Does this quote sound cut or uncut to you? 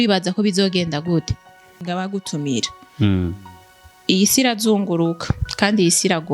cut